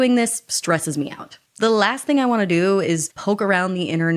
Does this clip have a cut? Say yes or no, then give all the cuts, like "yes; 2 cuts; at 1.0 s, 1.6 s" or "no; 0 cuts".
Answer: no; 0 cuts